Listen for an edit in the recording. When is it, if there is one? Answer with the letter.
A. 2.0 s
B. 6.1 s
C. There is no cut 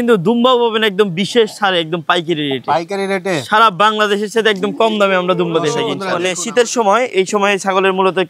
B